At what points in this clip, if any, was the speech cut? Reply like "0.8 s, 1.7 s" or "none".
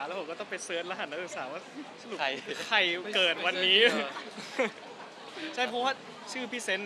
none